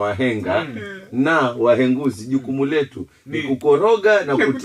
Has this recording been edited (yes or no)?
no